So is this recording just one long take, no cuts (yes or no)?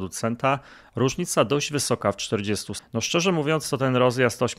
no